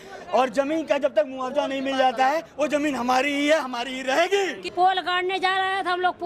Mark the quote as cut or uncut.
cut